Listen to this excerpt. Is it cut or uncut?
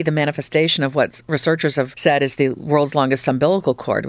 cut